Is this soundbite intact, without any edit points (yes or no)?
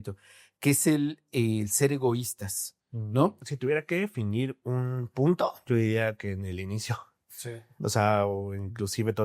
no